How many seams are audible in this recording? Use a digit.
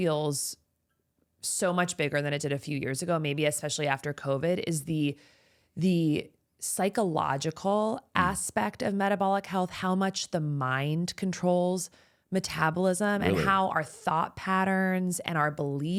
0